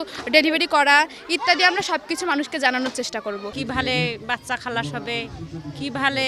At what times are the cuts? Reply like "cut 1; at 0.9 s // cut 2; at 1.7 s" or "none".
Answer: cut 1; at 3.5 s